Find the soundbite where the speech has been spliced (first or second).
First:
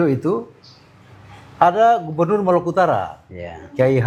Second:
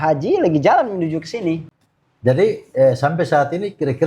second